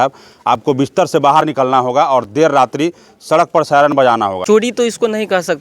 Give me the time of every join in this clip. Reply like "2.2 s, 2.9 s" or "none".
4.4 s